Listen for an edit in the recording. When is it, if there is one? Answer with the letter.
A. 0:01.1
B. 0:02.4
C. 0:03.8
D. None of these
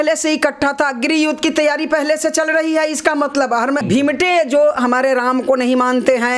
C